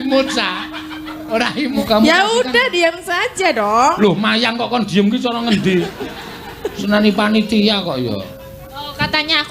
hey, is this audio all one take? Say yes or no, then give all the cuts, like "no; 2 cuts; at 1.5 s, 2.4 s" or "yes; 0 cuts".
no; 1 cut; at 1.8 s